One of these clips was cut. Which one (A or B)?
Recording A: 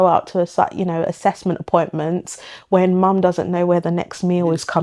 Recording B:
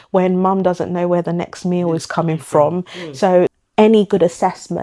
B